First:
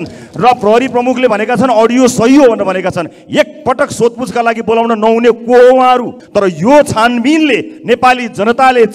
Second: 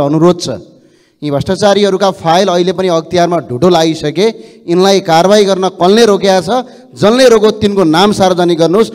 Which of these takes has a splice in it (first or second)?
first